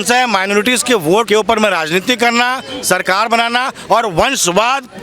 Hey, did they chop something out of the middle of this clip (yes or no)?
yes